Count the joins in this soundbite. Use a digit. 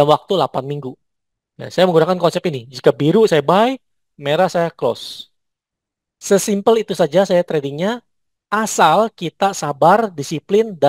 0